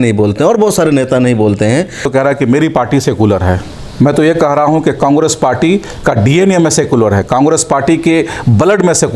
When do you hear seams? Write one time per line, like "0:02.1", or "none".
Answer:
0:02.1